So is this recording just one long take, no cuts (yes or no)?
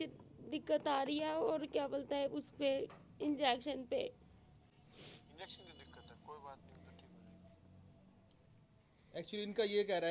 yes